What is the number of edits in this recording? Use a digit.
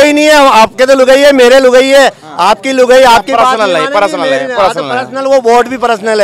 0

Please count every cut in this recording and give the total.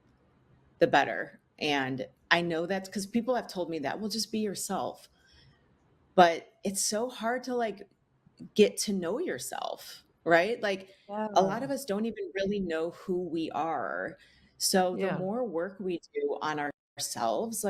0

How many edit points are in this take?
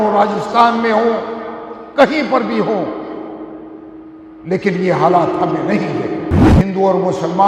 1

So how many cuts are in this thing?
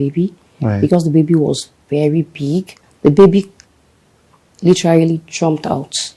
1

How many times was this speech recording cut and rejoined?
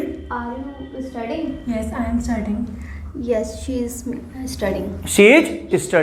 0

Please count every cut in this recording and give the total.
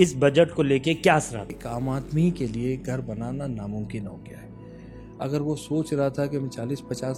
1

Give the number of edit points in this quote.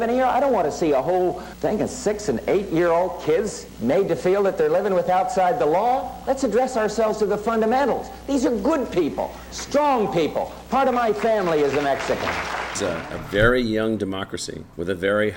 3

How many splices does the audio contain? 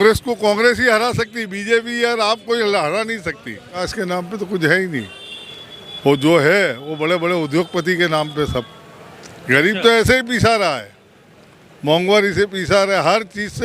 1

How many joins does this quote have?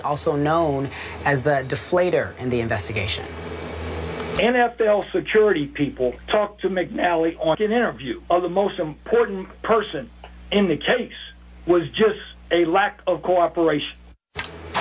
0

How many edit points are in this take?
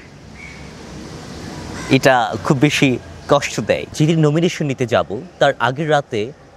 1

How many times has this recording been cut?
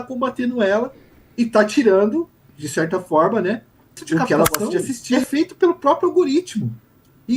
1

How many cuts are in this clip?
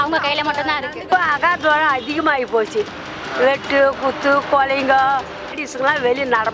2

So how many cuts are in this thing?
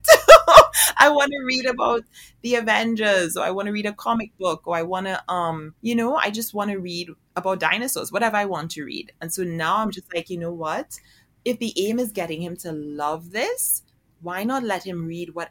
1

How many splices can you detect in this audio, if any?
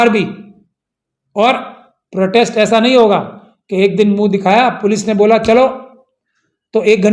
0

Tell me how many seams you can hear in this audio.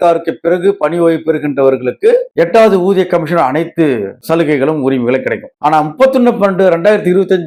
0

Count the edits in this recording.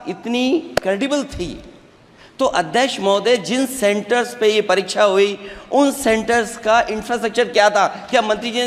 0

